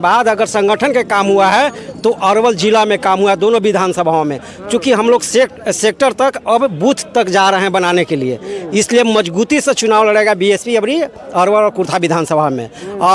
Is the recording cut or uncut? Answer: uncut